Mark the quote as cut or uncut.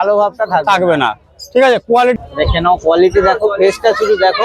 cut